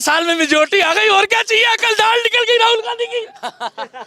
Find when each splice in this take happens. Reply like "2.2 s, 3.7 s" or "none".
none